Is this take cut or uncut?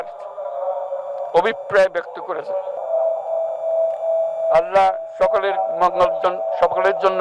cut